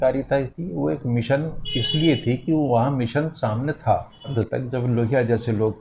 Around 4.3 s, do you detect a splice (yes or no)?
yes